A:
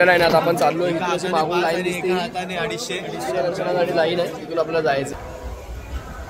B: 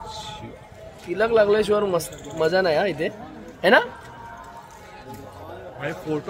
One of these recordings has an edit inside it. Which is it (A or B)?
A